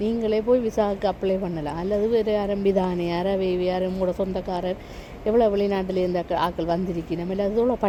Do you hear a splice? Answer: no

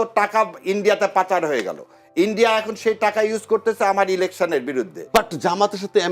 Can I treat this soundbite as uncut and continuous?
no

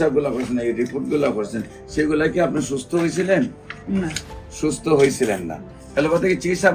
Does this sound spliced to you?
yes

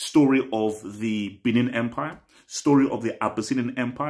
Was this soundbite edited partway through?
no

